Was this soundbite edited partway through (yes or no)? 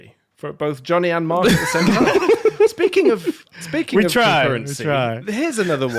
no